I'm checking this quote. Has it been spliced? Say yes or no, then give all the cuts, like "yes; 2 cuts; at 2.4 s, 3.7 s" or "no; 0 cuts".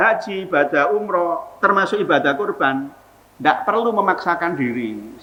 no; 0 cuts